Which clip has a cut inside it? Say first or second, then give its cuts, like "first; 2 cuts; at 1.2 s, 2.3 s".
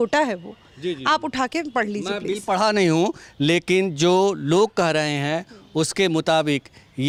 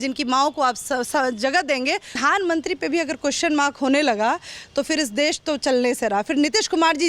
second; 1 cut; at 2.2 s